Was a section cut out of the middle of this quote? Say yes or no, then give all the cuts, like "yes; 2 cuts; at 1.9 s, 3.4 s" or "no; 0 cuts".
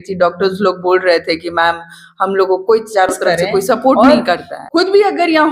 yes; 1 cut; at 4.1 s